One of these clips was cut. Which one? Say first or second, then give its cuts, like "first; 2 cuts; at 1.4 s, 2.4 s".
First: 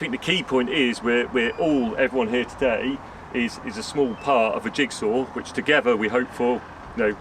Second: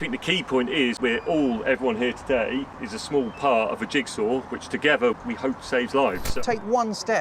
second; 4 cuts; at 1.0 s, 2.8 s, 5.2 s, 6.3 s